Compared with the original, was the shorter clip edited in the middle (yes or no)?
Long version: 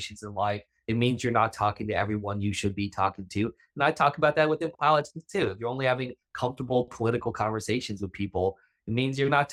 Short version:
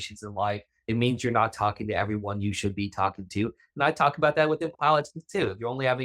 no